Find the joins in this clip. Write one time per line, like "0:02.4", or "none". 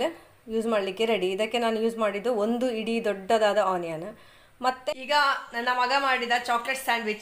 0:04.8

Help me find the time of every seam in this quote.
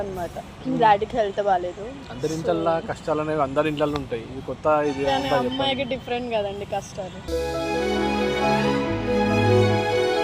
none

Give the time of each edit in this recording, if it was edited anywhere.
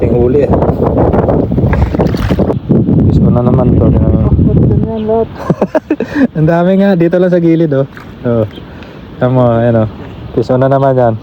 0:02.5

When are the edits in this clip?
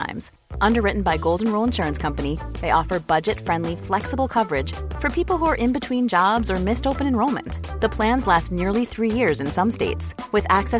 none

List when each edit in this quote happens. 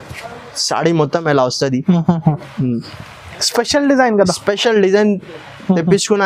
none

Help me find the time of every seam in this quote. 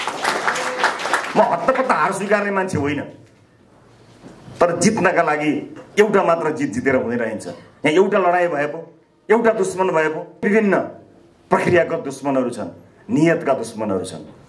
0:10.4

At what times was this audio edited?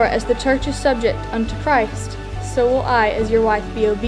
none

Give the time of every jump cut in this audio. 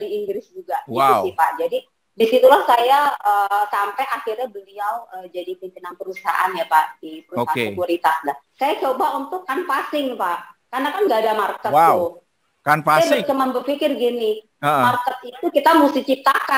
0:08.4

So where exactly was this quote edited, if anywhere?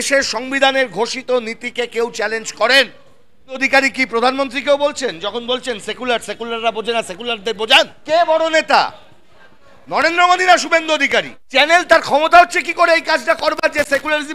0:03.6
0:08.0
0:11.4

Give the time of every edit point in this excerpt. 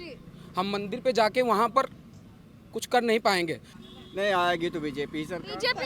0:03.7

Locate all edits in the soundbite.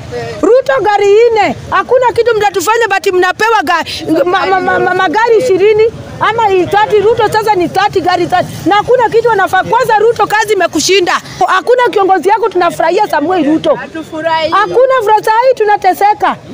0:11.3

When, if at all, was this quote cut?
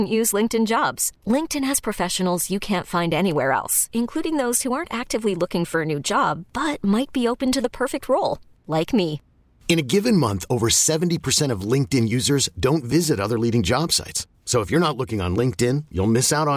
none

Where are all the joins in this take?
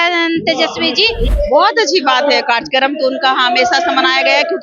0:01.3

